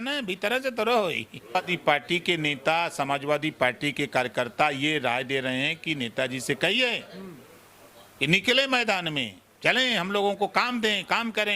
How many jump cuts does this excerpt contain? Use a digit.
1